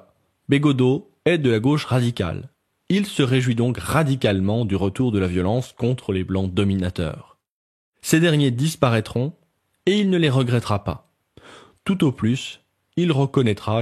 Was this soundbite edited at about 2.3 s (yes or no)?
no